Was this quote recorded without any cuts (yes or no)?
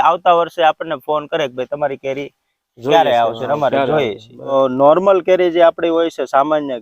no